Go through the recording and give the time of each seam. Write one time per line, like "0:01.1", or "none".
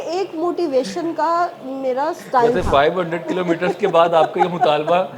none